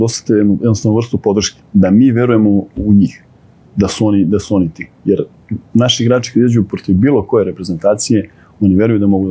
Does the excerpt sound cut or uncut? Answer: uncut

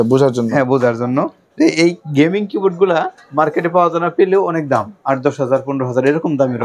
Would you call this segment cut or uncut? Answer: uncut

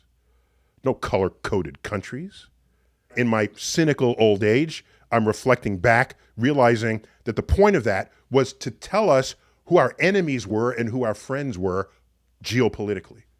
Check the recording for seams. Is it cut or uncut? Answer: cut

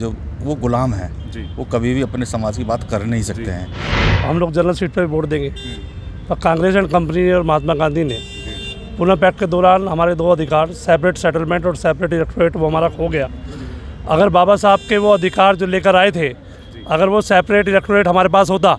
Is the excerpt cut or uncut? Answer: cut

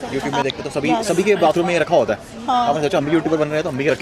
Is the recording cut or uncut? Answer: uncut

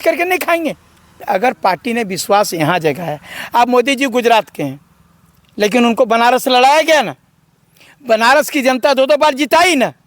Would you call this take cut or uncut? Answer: cut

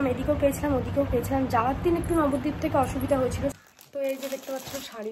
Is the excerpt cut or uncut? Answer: cut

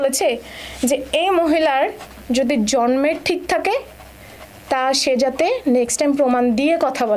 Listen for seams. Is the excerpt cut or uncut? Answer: uncut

